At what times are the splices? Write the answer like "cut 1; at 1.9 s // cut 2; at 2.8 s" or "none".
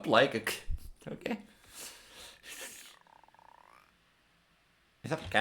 cut 1; at 2.8 s